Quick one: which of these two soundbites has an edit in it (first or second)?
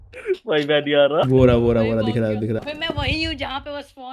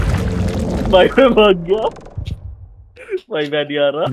first